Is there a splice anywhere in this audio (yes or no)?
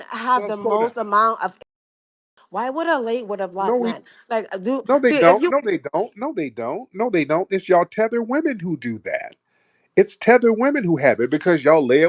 no